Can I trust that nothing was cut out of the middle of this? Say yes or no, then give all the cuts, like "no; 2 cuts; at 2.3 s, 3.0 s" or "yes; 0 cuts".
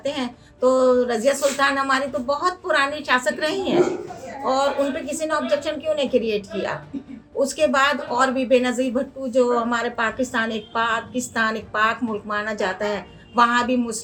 yes; 0 cuts